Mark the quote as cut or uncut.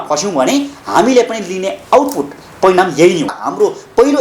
cut